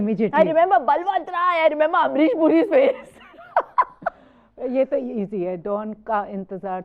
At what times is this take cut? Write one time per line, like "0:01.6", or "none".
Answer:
none